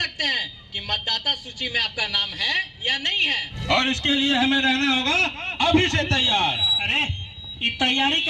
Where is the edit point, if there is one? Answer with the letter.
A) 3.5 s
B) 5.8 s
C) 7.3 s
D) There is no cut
A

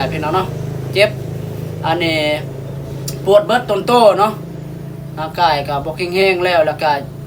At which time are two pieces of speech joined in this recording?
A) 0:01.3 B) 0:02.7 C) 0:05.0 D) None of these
D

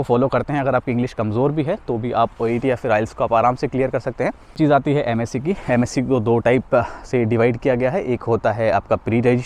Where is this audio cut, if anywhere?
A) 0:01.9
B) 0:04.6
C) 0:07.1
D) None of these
B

